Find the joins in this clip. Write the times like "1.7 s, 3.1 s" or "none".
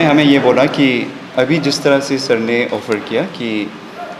1.2 s